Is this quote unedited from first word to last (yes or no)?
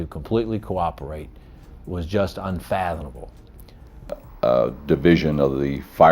no